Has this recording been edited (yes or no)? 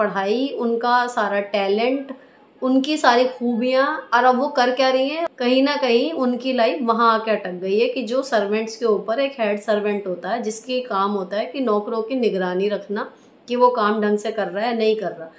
yes